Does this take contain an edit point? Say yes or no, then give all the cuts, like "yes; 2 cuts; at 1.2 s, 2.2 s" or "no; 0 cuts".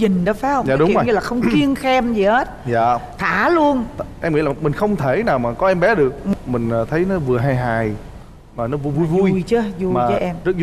no; 0 cuts